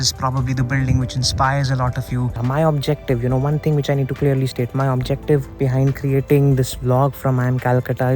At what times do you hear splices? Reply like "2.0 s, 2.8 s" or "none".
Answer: 2.4 s